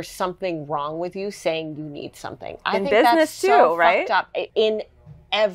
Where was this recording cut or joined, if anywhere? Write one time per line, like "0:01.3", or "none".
0:04.5